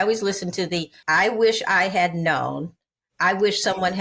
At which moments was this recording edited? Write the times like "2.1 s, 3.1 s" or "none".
1.0 s